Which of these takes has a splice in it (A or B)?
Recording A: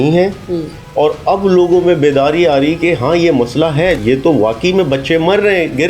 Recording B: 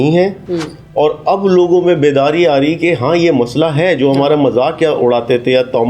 A